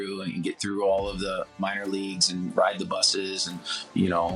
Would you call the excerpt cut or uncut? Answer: cut